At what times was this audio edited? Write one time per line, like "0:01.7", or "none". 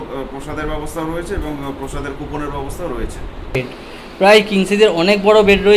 0:03.6